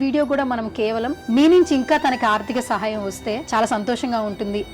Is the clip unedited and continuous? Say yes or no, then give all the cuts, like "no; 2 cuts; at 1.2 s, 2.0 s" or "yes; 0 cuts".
no; 2 cuts; at 1.2 s, 3.4 s